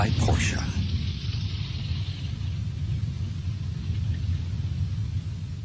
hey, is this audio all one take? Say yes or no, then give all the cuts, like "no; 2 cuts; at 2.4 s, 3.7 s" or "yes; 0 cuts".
no; 1 cut; at 2.9 s